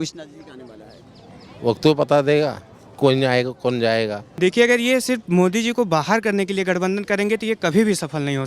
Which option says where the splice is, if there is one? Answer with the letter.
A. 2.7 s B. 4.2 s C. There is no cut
B